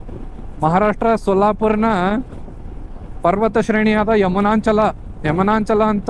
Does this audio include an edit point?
no; 0 cuts

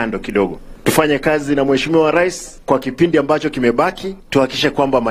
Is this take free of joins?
yes; 0 cuts

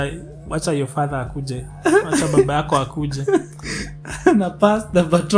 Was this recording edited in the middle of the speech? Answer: no; 0 cuts

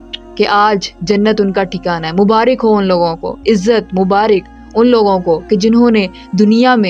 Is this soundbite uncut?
yes; 0 cuts

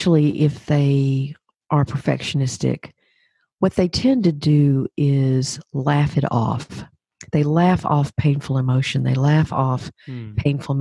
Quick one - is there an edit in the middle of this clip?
no; 0 cuts

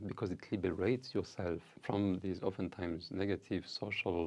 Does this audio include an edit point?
yes; 1 cut; at 1.7 s

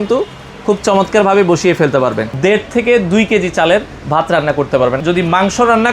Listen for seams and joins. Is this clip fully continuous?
no; 2 cuts; at 2.3 s, 5.0 s

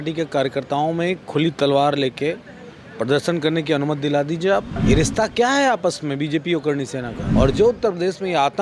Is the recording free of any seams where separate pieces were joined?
no; 2 cuts; at 4.7 s, 7.2 s

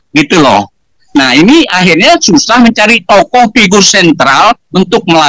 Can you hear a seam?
yes; 1 cut; at 1.0 s

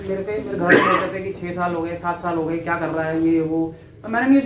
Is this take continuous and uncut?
yes; 0 cuts

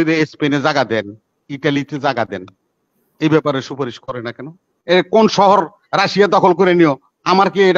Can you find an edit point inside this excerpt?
yes; 1 cut; at 4.7 s

